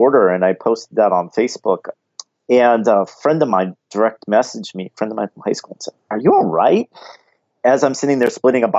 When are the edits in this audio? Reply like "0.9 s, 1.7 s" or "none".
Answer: 1.9 s